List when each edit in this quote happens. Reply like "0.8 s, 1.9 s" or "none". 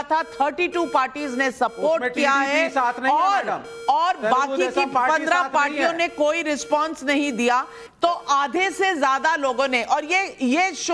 9.2 s

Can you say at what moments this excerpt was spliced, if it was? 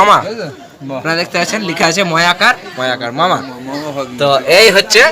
none

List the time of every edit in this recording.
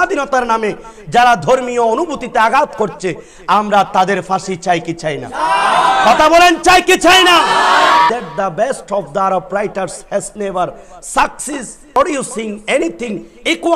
8.1 s, 12.0 s

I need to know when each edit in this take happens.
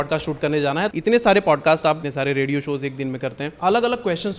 0.9 s, 2.0 s, 3.5 s

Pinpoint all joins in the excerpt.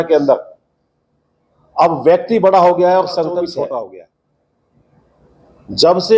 3.9 s

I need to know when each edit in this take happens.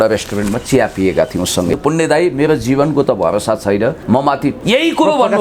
1.7 s, 4.2 s

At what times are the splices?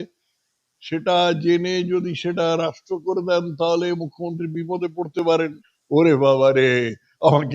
5.4 s

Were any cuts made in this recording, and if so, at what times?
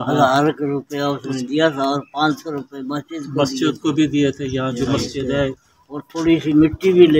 none

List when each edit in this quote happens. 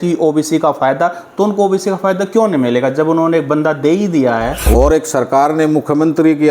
4.6 s

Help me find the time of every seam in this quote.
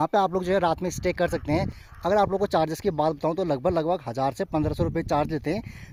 none

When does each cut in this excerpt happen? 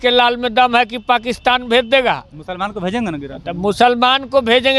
none

